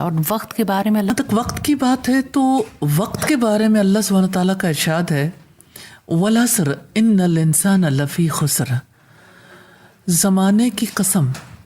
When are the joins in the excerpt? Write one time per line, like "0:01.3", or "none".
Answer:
0:01.1